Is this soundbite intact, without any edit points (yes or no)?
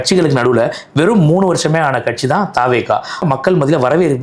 no